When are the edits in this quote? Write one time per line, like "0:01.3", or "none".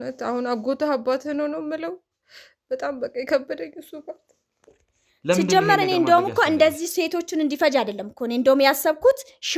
0:04.8